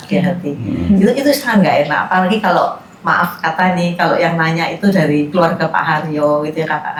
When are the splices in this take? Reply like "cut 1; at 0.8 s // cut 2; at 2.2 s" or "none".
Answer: none

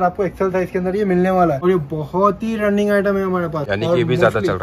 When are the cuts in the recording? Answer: cut 1; at 1.6 s // cut 2; at 3.6 s

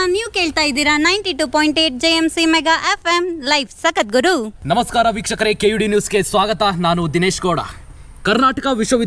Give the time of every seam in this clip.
cut 1; at 4.5 s

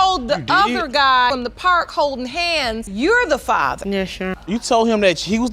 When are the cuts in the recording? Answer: cut 1; at 1.3 s // cut 2; at 4.4 s

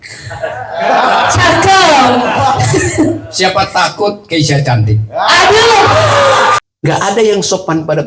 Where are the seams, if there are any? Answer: cut 1; at 6.6 s

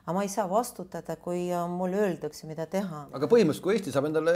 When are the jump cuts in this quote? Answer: cut 1; at 3.1 s

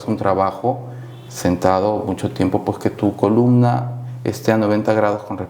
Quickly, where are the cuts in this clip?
none

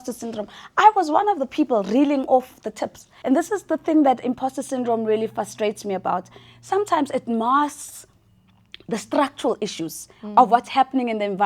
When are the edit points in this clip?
cut 1; at 3.1 s

